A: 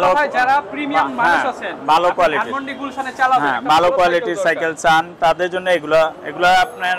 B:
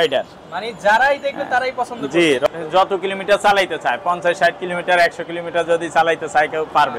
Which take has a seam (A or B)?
B